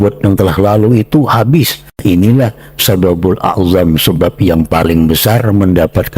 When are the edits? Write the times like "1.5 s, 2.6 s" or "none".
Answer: 1.8 s